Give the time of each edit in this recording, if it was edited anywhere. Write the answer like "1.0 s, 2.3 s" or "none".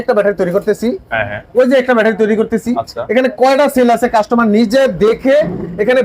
none